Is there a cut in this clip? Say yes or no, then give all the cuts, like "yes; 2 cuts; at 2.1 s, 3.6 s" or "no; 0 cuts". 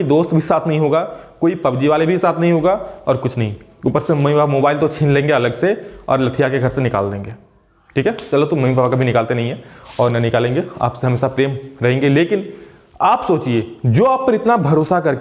no; 0 cuts